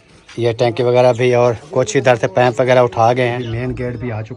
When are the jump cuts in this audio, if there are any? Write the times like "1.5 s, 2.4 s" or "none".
3.4 s

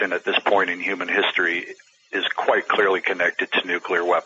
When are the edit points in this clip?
none

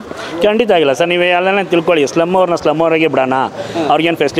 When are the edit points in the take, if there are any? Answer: none

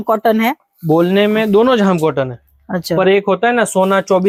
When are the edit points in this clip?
none

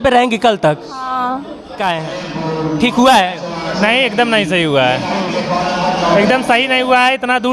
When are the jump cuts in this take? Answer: 1.8 s

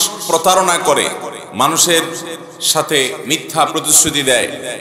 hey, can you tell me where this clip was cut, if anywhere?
1.4 s

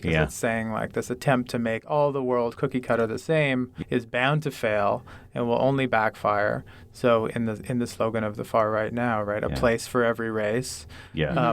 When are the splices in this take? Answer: 3.7 s

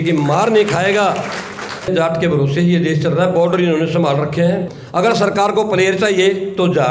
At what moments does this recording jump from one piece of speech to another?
1.9 s, 4.8 s

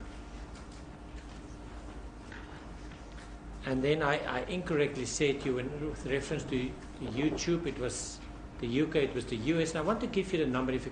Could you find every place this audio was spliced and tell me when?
2.7 s

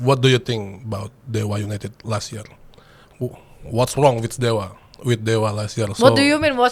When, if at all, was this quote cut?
none

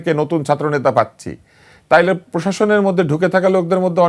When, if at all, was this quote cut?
none

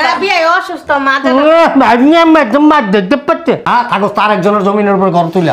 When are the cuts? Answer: 3.6 s

